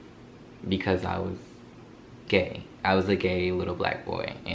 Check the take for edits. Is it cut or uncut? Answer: uncut